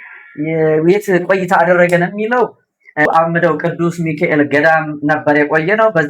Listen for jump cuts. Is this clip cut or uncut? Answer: cut